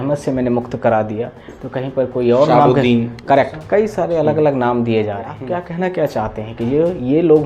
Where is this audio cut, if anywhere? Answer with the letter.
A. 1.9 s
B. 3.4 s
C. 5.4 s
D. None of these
C